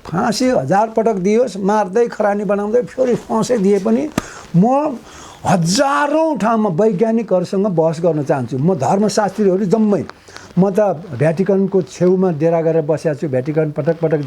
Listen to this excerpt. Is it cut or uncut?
uncut